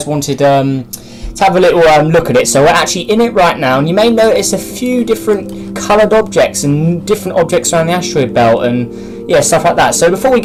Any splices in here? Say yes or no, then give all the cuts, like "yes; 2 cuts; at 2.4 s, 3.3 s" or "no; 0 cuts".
no; 0 cuts